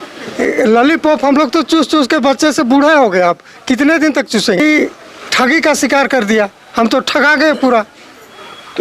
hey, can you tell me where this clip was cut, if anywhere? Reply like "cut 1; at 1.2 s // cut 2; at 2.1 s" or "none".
cut 1; at 4.6 s